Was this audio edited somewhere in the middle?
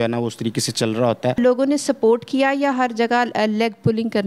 yes; 1 cut; at 1.4 s

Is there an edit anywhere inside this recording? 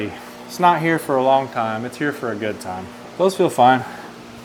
no; 0 cuts

